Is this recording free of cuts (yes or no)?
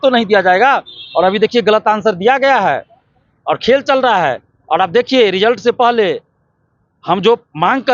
yes